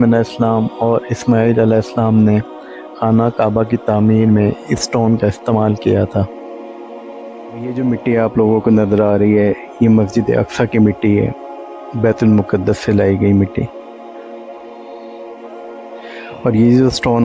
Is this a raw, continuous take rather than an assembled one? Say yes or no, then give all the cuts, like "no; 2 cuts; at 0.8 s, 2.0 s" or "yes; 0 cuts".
no; 1 cut; at 7.7 s